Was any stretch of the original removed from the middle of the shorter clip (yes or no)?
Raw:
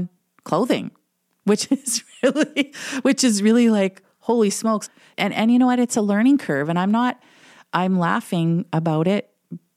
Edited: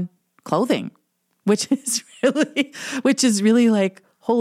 no